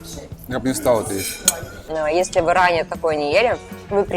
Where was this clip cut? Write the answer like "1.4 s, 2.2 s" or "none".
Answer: 1.9 s

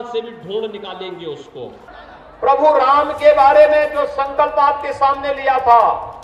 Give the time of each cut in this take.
1.8 s

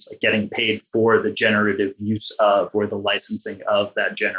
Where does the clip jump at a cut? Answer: none

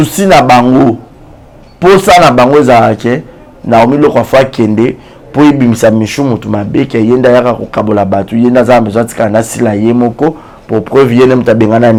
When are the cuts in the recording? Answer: none

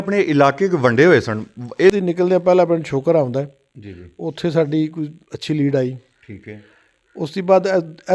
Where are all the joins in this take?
2.0 s

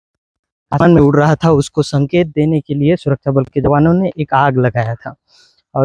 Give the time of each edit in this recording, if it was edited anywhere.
none

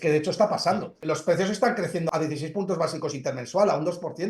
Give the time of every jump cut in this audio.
1.0 s, 2.1 s

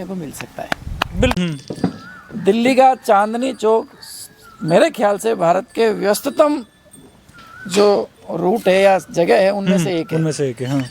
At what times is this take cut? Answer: 1.4 s

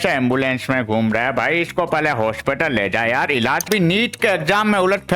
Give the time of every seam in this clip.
3.7 s

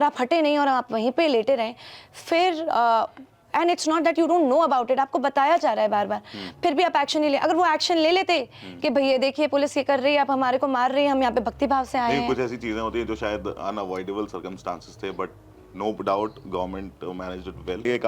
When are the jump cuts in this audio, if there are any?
none

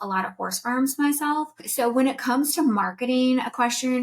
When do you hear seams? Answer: 1.6 s

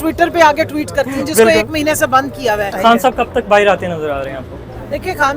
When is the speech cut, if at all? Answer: 2.7 s

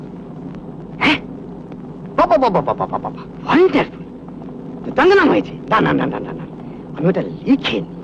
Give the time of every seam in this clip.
none

